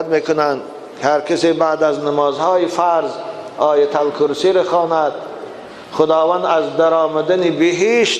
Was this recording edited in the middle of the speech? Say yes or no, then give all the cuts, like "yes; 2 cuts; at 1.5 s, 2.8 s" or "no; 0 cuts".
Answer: no; 0 cuts